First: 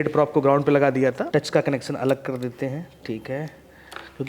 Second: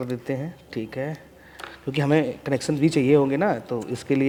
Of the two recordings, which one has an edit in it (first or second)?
first